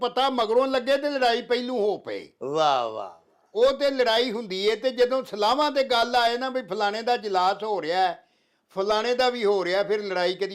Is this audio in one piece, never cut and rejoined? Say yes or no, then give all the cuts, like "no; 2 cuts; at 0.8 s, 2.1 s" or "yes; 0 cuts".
yes; 0 cuts